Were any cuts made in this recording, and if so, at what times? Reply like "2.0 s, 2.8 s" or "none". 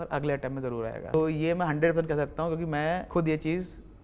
1.1 s, 3.0 s